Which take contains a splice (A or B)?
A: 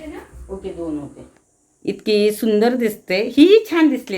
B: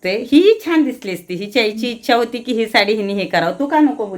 A